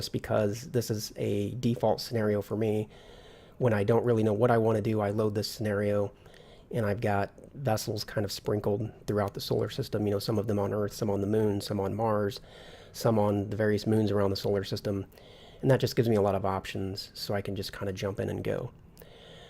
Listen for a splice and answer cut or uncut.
cut